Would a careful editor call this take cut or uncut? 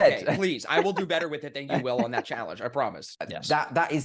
cut